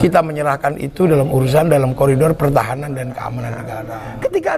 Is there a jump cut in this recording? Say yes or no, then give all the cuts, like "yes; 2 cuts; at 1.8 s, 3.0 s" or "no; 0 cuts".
yes; 1 cut; at 3.6 s